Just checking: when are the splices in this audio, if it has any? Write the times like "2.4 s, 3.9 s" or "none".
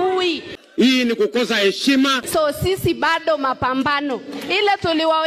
2.2 s